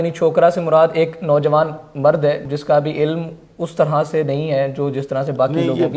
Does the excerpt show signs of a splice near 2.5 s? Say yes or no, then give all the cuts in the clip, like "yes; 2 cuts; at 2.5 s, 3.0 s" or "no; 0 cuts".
yes; 1 cut; at 2.5 s